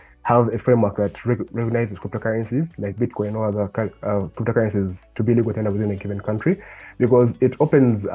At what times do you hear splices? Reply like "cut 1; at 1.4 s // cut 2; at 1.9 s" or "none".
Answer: none